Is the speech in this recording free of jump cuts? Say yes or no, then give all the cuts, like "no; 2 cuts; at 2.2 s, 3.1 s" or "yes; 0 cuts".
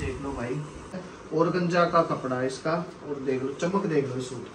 no; 1 cut; at 1.1 s